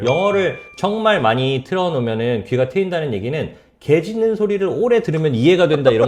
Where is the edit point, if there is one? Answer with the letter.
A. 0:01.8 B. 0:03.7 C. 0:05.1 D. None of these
D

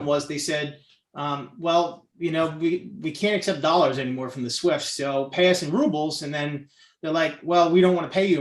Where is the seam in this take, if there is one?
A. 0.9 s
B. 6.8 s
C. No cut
C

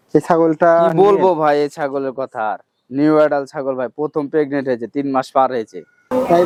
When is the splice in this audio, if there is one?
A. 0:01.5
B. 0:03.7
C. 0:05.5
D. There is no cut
D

